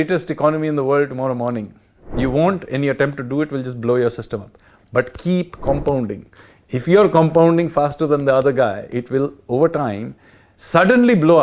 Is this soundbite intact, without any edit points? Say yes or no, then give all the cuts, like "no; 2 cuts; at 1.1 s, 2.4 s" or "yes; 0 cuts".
no; 1 cut; at 8.8 s